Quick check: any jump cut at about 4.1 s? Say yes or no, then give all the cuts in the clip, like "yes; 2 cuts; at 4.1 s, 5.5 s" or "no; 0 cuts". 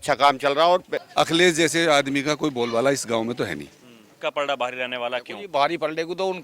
yes; 2 cuts; at 1.0 s, 4.1 s